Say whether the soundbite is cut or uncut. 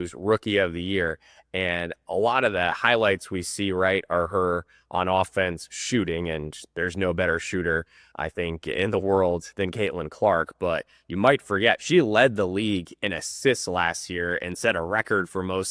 uncut